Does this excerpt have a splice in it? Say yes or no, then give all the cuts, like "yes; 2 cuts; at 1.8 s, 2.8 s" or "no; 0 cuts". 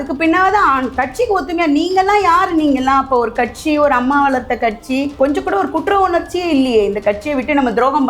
yes; 1 cut; at 5.1 s